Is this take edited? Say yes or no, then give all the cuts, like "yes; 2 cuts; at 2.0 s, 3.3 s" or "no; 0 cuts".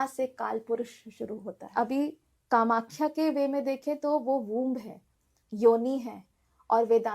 yes; 1 cut; at 1.6 s